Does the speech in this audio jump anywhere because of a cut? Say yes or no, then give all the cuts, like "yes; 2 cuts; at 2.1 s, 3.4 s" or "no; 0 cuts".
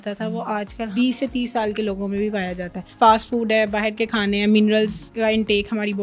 yes; 3 cuts; at 0.9 s, 2.8 s, 5.0 s